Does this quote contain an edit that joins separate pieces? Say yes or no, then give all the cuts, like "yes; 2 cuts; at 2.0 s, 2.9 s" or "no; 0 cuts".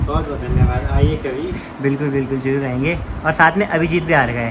no; 0 cuts